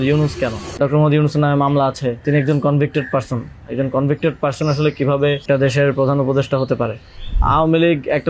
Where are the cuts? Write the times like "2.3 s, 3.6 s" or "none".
0.8 s, 2.2 s, 5.4 s, 7.4 s